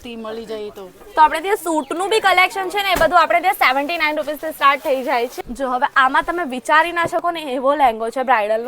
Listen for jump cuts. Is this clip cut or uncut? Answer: cut